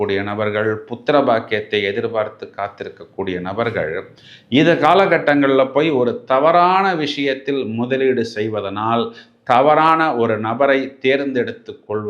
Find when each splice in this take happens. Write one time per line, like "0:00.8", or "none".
none